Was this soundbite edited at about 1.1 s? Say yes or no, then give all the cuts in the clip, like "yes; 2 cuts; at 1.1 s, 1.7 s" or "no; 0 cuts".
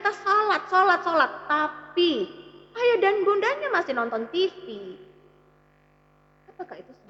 no; 0 cuts